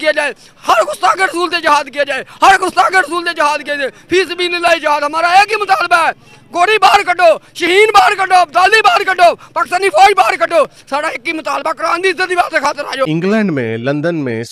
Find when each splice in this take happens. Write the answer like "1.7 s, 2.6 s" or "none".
none